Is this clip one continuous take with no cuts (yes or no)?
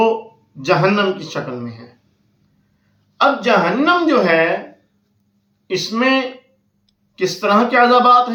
yes